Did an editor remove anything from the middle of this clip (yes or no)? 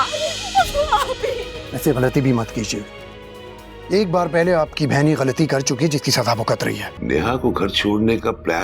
yes